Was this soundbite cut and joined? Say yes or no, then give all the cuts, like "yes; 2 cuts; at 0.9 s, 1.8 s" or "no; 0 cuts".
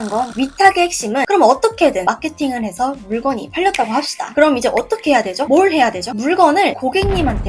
yes; 2 cuts; at 1.3 s, 2.0 s